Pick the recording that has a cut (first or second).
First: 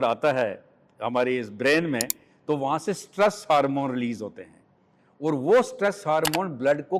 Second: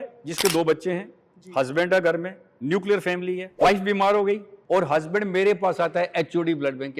second